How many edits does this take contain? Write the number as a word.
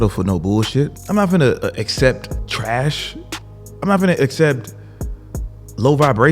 two